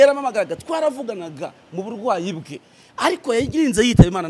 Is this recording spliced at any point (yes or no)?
no